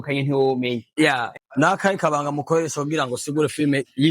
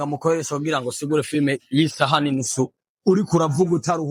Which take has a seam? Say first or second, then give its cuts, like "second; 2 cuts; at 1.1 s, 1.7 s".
first; 1 cut; at 1.3 s